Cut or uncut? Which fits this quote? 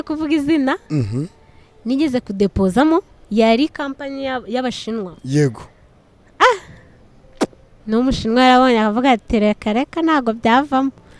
uncut